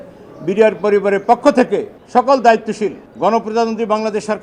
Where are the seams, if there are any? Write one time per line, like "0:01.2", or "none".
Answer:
0:02.0
0:03.0